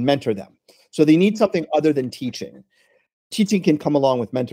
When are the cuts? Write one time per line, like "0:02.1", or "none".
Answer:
0:03.3